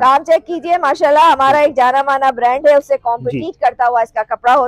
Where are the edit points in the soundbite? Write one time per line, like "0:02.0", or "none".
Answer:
none

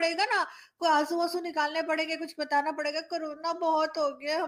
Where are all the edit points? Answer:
none

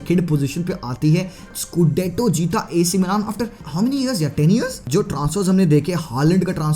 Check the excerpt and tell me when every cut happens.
0:01.5
0:04.8

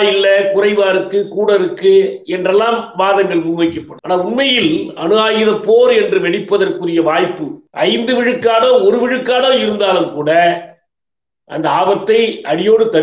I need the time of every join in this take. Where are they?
none

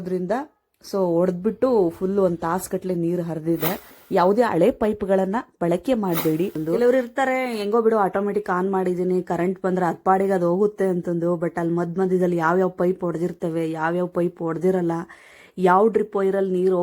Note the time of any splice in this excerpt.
0:04.0
0:06.6

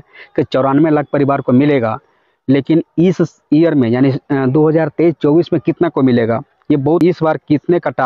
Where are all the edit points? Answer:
0:07.0

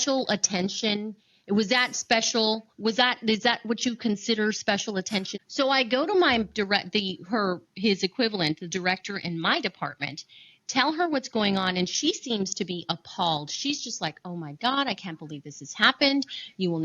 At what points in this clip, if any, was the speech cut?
0:05.3

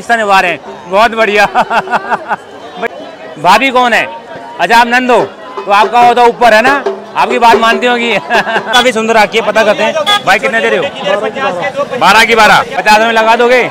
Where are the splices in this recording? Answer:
0:02.8
0:08.7
0:12.8

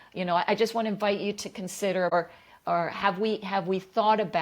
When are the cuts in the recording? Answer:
0:02.1

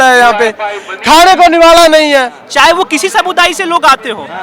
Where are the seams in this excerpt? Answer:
0:02.4

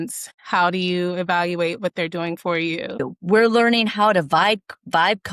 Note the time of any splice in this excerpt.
0:02.9

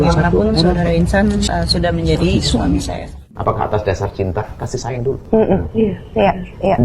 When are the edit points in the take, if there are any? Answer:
0:01.5
0:03.2

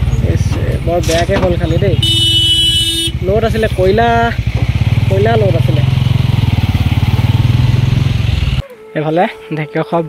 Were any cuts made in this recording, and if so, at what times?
0:08.9

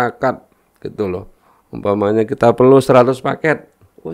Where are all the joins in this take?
0:01.4

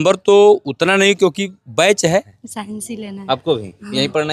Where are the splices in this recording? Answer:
0:02.4

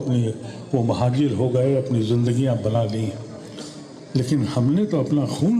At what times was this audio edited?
0:02.8

